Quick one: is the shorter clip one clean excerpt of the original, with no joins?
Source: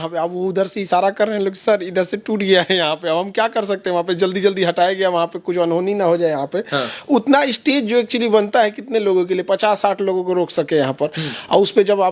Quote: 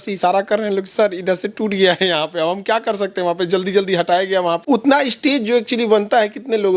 no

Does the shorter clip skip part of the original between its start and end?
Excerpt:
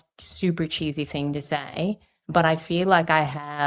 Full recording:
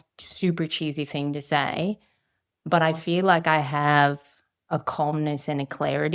yes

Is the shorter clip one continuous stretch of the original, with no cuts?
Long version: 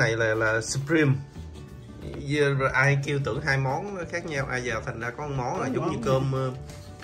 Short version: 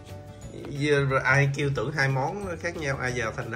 yes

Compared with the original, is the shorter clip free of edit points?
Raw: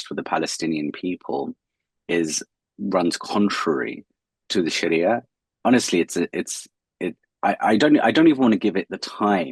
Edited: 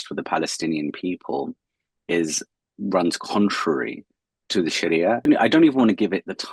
no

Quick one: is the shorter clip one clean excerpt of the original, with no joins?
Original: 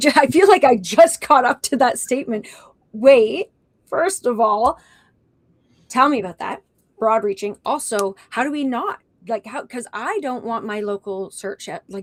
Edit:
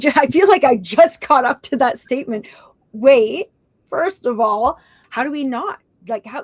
no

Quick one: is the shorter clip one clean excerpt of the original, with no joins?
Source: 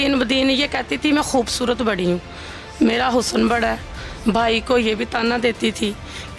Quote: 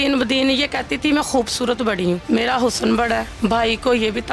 no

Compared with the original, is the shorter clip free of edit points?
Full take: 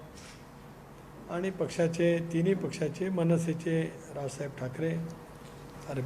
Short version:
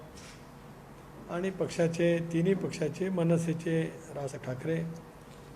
no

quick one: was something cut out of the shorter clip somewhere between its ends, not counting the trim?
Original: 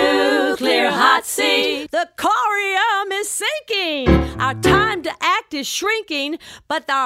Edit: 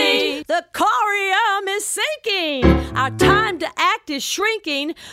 no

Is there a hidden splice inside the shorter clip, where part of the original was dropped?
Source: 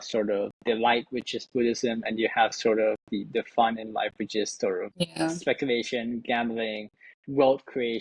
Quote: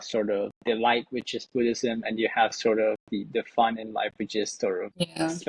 no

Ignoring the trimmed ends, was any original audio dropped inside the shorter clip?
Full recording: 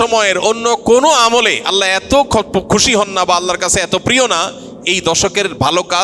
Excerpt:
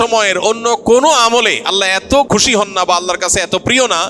yes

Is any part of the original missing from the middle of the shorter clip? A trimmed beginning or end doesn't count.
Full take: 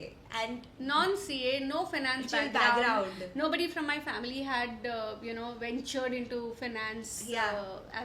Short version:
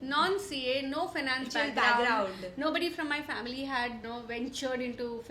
yes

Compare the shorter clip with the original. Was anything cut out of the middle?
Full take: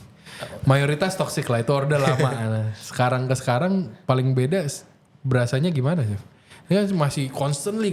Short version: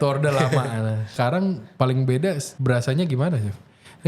yes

